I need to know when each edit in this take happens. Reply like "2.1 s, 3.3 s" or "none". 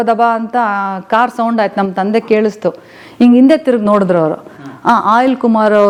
none